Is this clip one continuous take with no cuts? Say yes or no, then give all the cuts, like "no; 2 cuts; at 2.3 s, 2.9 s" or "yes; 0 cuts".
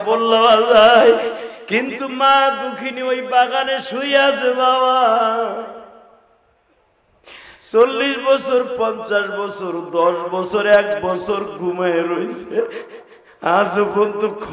yes; 0 cuts